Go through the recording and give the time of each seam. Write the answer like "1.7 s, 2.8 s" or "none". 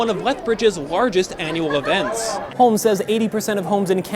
2.4 s